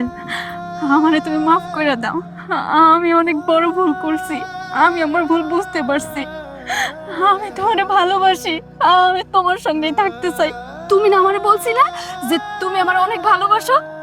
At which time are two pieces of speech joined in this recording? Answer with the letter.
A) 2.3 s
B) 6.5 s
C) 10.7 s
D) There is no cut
C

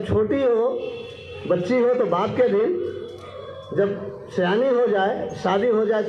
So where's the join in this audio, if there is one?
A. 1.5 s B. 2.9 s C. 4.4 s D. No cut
D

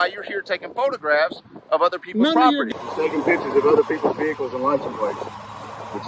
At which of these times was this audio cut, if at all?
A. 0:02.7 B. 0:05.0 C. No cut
A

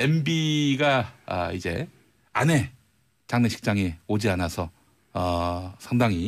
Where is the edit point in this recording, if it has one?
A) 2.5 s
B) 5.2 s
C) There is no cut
A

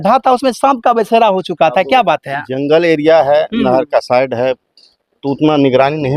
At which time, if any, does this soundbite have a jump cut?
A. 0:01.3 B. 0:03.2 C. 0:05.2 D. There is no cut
D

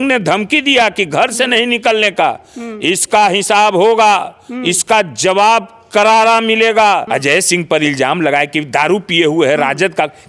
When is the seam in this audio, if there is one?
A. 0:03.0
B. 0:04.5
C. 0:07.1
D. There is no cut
C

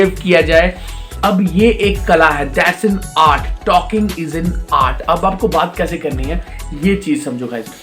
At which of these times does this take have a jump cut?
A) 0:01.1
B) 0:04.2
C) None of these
A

